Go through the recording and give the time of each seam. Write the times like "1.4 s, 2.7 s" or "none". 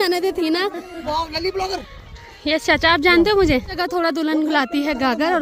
1.0 s, 3.8 s